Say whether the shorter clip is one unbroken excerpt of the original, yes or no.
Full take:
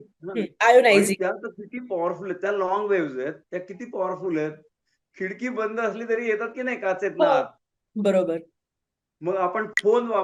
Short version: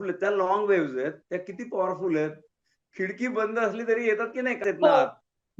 no